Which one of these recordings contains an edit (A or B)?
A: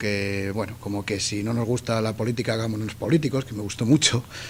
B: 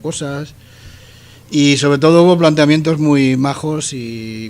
B